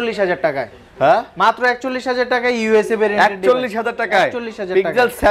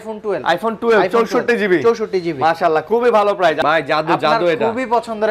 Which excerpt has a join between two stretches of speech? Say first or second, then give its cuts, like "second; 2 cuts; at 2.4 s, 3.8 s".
second; 1 cut; at 3.6 s